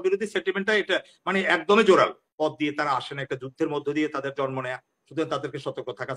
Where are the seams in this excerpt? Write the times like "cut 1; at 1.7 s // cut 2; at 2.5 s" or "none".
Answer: cut 1; at 2.2 s